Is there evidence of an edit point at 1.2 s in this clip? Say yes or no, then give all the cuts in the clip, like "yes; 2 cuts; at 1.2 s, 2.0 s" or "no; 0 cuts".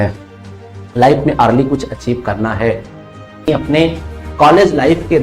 no; 1 cut; at 3.5 s